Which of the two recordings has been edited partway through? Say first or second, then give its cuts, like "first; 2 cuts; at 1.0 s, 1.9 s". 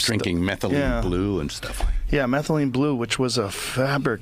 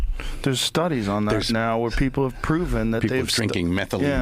first; 1 cut; at 1.9 s